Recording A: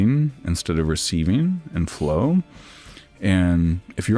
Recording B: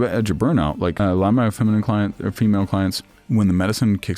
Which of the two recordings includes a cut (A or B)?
B